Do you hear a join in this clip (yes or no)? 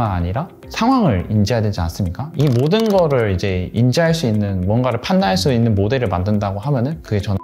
no